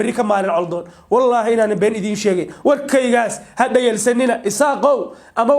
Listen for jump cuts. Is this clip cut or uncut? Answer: uncut